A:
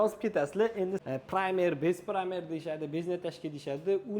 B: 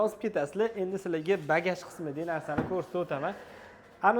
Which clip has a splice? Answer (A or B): A